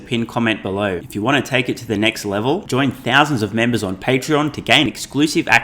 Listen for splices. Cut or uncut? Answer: cut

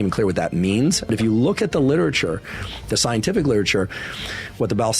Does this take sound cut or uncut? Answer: cut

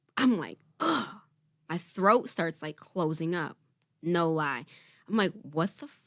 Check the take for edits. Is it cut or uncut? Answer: uncut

